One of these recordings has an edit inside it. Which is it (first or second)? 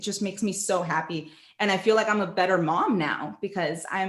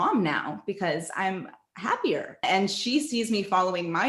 second